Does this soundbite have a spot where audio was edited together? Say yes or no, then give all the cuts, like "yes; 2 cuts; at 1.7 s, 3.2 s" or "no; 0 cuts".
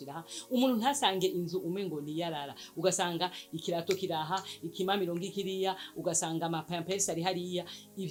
no; 0 cuts